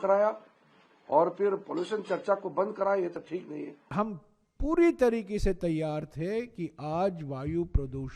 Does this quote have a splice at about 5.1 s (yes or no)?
no